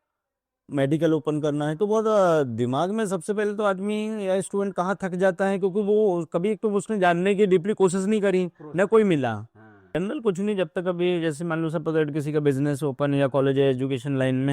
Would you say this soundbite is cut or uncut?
cut